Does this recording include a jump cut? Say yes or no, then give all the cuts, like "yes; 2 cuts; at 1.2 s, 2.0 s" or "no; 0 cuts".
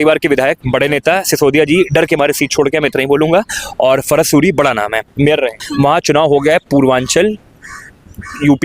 yes; 1 cut; at 5.6 s